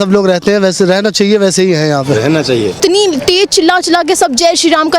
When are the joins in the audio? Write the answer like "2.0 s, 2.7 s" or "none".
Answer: 2.8 s